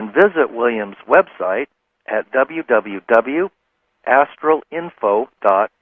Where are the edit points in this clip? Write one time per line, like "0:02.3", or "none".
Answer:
0:01.9